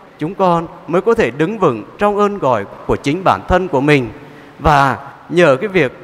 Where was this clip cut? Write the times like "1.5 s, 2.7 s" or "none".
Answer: none